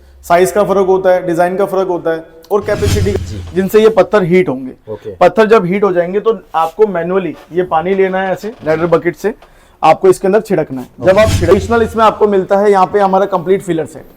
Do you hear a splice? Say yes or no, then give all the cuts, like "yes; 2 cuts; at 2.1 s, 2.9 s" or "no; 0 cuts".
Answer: yes; 2 cuts; at 3.1 s, 11.5 s